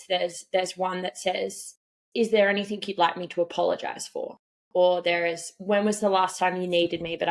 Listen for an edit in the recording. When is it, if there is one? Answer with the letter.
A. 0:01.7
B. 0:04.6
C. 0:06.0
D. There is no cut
D